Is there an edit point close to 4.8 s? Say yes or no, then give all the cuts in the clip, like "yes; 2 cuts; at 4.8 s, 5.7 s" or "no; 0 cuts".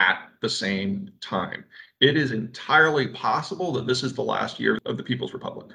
yes; 1 cut; at 4.8 s